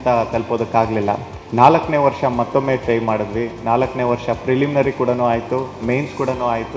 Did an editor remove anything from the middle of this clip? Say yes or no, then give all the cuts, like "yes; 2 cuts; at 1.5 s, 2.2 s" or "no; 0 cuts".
yes; 1 cut; at 1.3 s